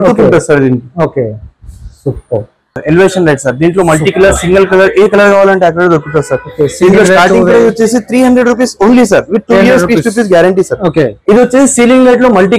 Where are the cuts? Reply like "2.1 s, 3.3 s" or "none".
2.8 s, 11.2 s